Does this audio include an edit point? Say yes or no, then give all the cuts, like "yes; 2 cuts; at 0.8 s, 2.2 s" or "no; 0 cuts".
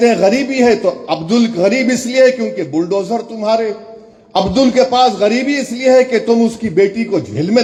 no; 0 cuts